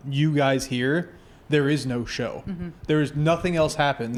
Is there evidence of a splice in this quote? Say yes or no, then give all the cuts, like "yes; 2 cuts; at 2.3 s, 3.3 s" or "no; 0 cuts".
no; 0 cuts